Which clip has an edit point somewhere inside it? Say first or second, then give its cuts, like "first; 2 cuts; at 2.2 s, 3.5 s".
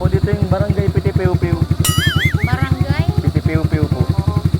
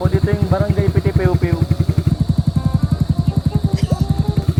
first; 1 cut; at 2.1 s